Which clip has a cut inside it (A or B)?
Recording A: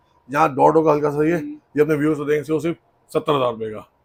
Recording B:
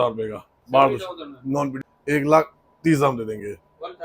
B